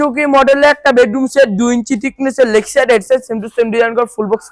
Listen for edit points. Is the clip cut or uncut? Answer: uncut